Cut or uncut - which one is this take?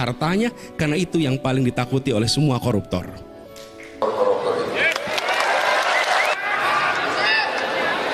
cut